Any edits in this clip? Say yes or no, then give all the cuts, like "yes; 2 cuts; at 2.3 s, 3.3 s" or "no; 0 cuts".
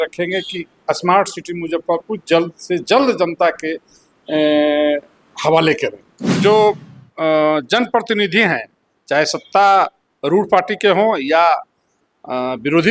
yes; 1 cut; at 6.3 s